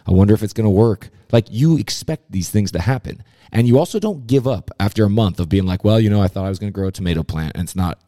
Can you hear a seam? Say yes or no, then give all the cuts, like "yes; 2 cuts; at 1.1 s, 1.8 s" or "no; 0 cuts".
no; 0 cuts